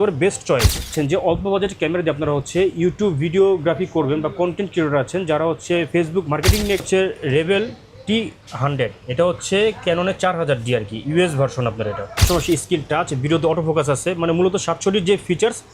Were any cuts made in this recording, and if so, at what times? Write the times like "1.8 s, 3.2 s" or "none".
0.9 s, 6.9 s, 12.2 s